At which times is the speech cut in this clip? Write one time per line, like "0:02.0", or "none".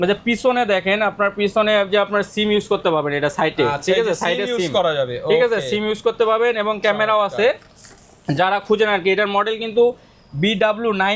none